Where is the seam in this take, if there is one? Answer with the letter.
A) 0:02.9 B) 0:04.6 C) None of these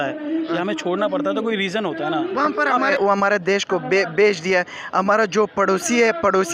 A